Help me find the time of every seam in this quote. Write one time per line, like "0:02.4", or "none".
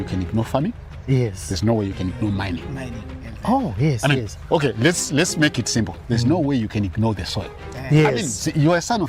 none